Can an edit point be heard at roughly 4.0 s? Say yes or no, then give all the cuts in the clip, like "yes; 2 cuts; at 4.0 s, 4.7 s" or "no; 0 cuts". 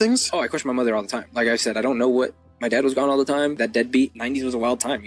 yes; 2 cuts; at 1.3 s, 4.0 s